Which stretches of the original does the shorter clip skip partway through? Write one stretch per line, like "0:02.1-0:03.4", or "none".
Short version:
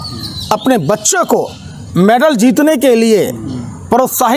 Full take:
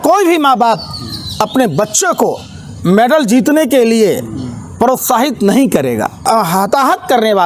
none